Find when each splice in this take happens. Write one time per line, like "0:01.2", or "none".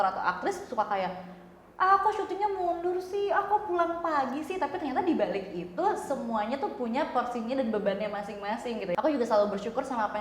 0:08.9